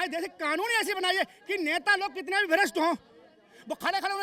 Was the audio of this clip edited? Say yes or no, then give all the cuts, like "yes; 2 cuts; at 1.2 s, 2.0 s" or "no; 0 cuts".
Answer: no; 0 cuts